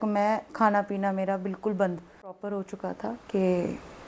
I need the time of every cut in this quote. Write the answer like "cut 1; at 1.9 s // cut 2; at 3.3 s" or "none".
cut 1; at 2.6 s